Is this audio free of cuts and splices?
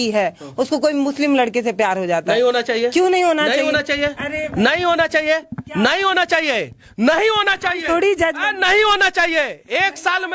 yes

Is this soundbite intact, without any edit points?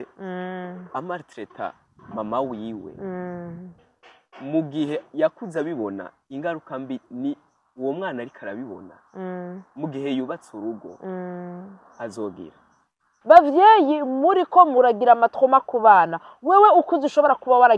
no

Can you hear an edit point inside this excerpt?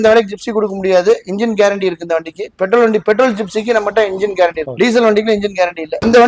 no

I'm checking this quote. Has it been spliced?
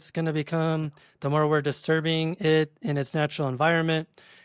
no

